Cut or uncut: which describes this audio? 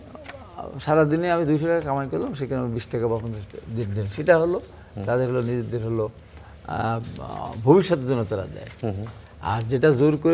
uncut